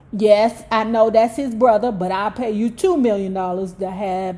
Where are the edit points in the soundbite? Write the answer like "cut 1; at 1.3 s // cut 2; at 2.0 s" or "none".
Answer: none

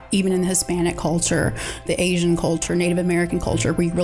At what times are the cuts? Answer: cut 1; at 1.8 s // cut 2; at 2.6 s

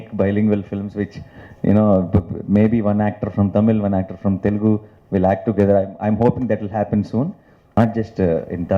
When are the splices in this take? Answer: cut 1; at 7.8 s

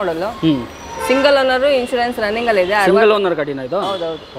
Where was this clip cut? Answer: none

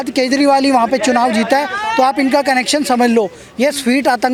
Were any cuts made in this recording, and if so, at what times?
none

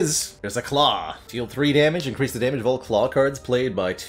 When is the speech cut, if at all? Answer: none

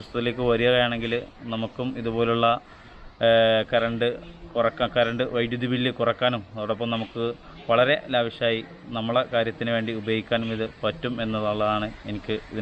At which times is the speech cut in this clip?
none

